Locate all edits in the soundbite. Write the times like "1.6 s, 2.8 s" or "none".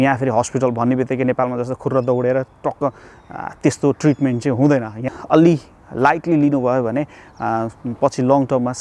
4.9 s